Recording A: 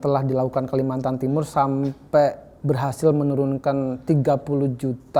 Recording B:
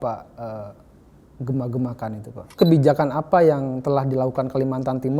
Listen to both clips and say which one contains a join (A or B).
B